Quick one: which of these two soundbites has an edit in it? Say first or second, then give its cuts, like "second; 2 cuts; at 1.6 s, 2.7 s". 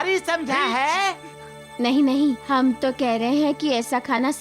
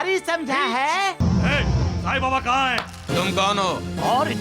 second; 1 cut; at 1.2 s